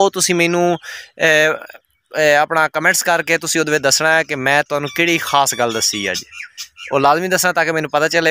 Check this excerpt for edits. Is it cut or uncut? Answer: uncut